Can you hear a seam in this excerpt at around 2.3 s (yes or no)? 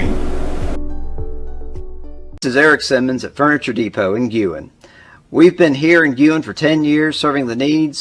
yes